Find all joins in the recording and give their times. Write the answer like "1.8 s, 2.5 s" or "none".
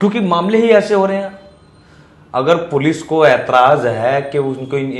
none